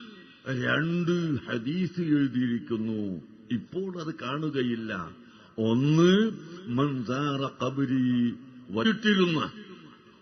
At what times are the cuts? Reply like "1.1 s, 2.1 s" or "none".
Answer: none